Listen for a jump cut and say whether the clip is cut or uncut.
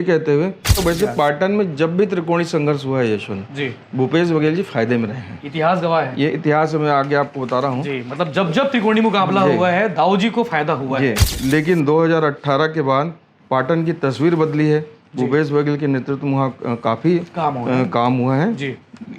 cut